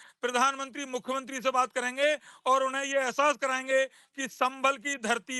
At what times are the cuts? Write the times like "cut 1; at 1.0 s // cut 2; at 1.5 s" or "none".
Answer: none